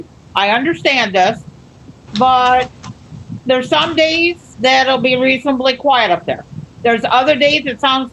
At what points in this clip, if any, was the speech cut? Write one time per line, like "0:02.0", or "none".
none

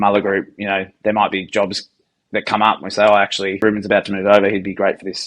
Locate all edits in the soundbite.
0:03.6

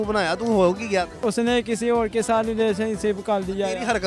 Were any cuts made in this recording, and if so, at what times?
0:01.2

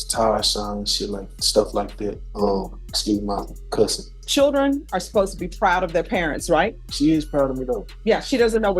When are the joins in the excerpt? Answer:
0:02.2
0:04.2
0:06.8
0:07.9

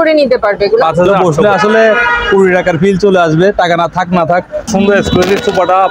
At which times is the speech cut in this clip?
0:01.1
0:04.7

